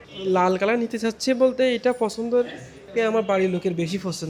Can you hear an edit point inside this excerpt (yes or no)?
no